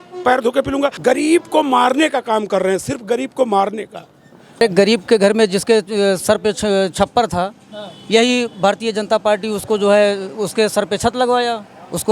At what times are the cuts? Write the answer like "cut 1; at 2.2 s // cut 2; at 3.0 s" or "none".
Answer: cut 1; at 1.0 s // cut 2; at 4.6 s